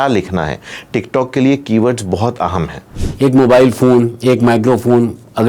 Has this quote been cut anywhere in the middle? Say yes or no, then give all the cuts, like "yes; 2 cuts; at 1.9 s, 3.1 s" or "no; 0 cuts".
yes; 1 cut; at 3.0 s